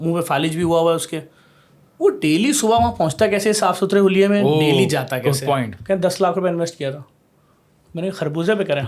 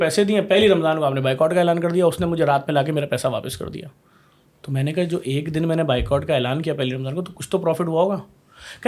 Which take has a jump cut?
first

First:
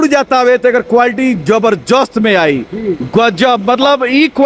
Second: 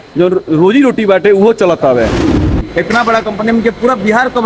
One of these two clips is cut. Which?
second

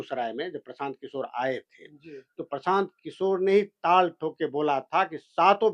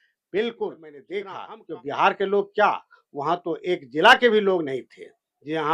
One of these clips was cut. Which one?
second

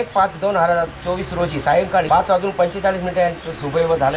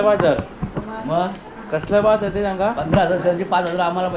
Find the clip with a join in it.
first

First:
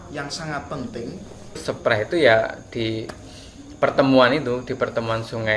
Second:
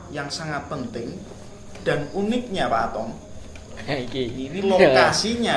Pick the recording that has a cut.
first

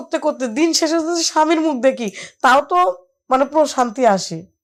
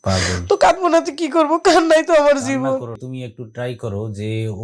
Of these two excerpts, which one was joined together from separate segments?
second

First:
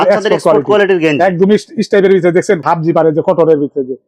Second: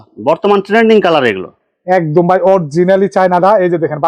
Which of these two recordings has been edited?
first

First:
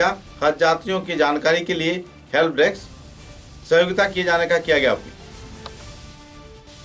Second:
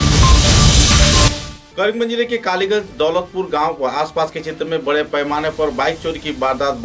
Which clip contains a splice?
second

